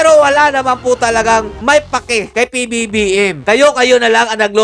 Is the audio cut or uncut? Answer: cut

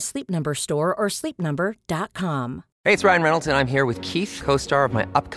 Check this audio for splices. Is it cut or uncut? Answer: cut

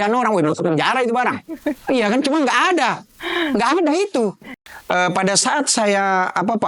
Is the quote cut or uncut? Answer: cut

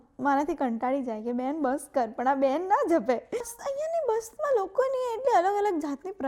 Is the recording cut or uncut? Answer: cut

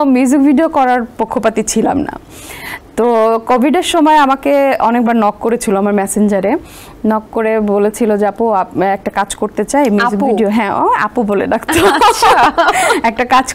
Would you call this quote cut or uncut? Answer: uncut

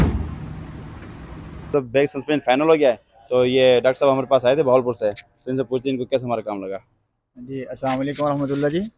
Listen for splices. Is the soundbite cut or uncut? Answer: cut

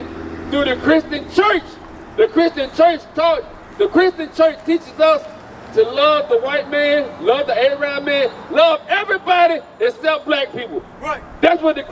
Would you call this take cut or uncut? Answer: uncut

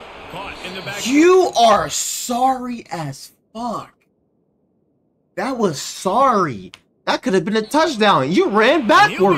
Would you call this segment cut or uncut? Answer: uncut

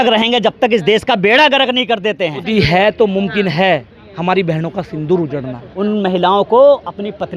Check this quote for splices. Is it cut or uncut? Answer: cut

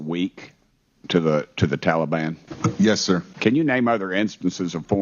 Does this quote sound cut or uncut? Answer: cut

